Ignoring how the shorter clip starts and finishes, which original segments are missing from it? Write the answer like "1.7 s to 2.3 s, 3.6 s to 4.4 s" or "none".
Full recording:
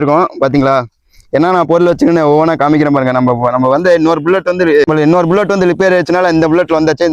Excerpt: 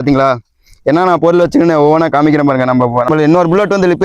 3.5 s to 4.9 s